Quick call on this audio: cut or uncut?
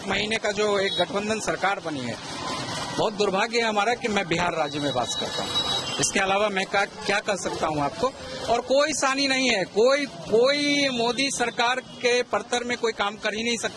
uncut